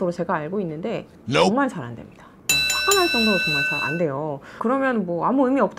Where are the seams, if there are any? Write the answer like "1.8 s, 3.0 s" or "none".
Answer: 4.5 s

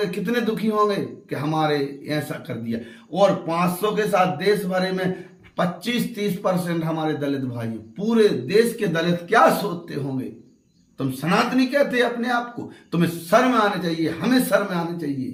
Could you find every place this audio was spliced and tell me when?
none

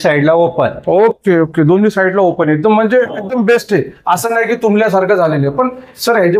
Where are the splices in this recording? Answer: none

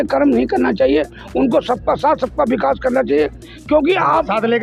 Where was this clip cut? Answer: none

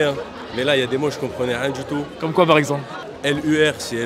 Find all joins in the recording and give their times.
none

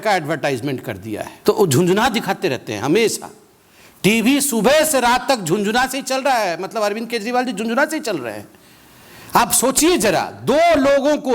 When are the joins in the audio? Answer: 1.3 s

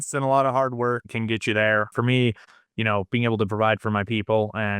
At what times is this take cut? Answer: 1.0 s, 1.9 s

